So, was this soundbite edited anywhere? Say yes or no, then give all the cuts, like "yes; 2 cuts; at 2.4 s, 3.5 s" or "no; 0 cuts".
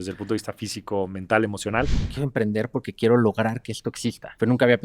yes; 1 cut; at 1.9 s